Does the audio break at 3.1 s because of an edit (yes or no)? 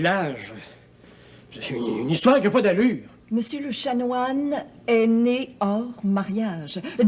yes